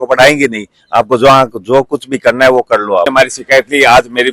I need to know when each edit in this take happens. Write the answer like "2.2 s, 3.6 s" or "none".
3.1 s